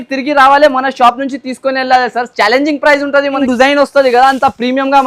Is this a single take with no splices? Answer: no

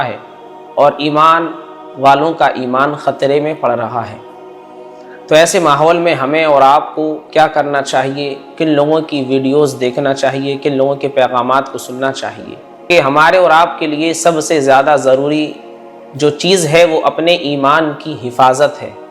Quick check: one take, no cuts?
no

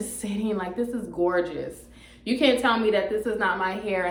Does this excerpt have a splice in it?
no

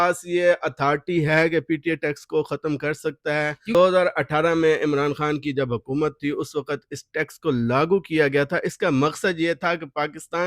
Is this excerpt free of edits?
no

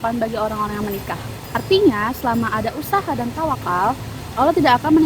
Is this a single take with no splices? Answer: yes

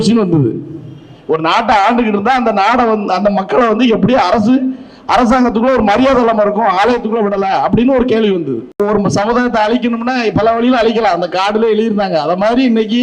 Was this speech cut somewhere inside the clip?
yes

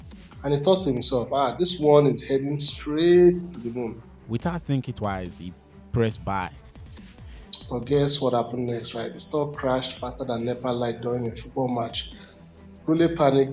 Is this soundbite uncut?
no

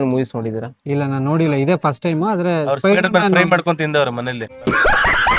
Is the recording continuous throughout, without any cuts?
yes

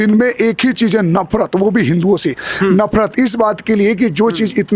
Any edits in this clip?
no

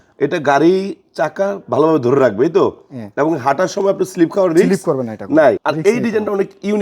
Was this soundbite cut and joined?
yes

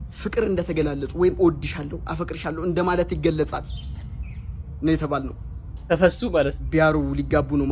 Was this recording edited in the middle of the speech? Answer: no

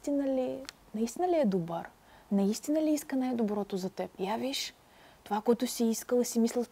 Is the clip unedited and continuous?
no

